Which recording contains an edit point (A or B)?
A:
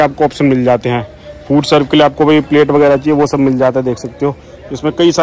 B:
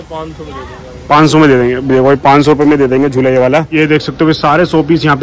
B